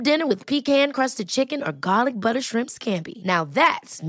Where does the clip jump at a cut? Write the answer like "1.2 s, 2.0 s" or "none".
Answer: none